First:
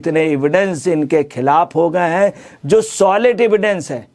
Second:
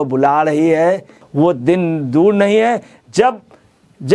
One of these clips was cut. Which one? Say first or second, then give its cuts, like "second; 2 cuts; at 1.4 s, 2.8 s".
second; 1 cut; at 1.2 s